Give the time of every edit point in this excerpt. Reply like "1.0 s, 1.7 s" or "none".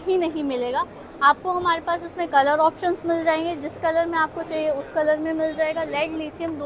none